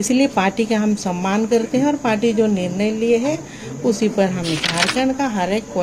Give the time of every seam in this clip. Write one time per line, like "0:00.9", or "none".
0:04.6